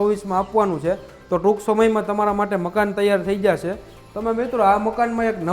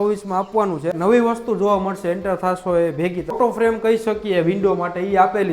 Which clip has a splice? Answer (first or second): second